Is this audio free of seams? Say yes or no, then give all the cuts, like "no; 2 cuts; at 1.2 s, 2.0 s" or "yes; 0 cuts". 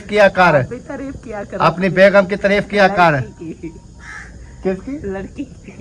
yes; 0 cuts